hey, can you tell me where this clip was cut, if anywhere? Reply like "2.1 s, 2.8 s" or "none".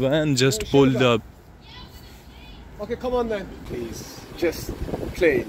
3.7 s